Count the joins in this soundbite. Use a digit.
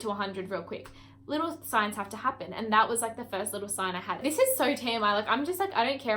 1